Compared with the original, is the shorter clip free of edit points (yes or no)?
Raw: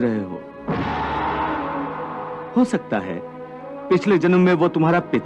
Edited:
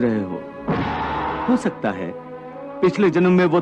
no